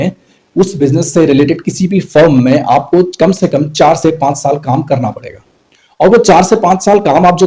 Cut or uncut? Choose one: uncut